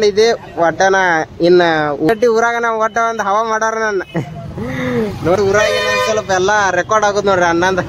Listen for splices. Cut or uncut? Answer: cut